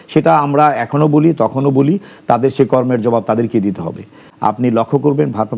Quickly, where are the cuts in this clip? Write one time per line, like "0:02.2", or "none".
0:04.2